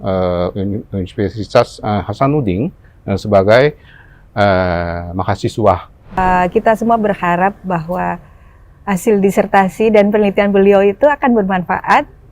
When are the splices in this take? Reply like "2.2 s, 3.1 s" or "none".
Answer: 6.2 s